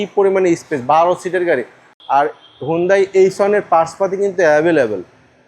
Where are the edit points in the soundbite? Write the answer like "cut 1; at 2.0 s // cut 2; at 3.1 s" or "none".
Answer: cut 1; at 1.9 s